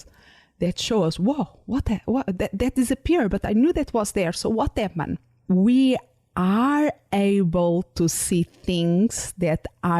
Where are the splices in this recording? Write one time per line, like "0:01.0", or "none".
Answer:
0:05.3